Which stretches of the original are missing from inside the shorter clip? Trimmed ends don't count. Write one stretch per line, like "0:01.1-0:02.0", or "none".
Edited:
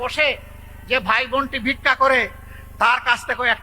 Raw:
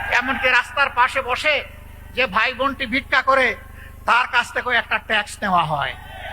none